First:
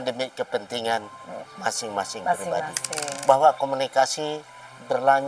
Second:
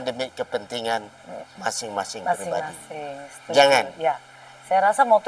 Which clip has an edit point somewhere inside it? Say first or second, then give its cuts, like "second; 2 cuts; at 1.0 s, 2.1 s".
first; 1 cut; at 3.0 s